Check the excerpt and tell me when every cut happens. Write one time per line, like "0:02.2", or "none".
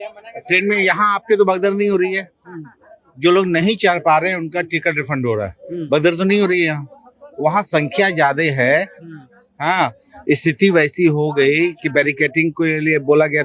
none